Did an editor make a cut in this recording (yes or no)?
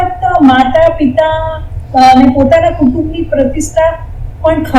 no